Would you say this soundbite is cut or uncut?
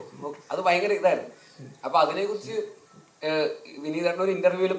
uncut